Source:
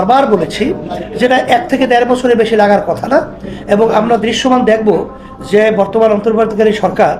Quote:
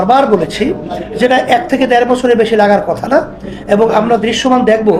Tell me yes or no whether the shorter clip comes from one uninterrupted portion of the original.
yes